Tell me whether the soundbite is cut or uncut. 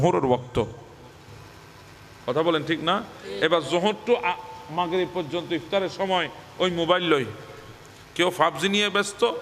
uncut